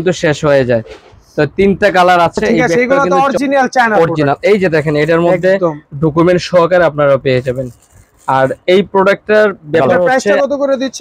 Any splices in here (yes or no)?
yes